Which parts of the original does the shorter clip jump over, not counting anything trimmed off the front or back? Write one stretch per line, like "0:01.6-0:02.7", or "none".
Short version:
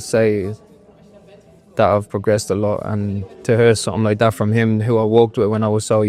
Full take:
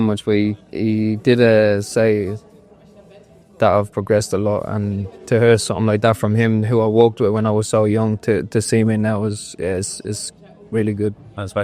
none